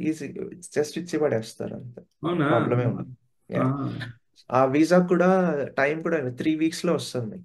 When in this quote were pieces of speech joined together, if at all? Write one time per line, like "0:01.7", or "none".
none

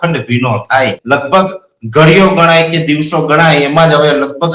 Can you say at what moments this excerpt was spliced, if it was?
0:01.0

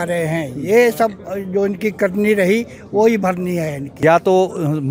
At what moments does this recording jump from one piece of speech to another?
0:03.8

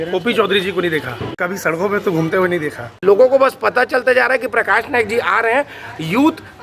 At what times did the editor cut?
0:01.2
0:02.9

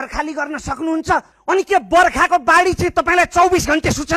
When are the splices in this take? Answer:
0:01.3

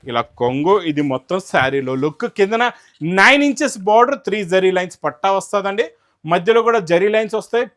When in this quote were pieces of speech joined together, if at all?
none

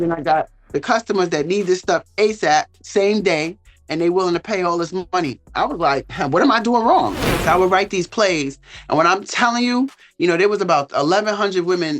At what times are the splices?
0:07.2

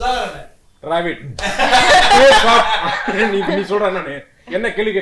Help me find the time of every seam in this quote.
none

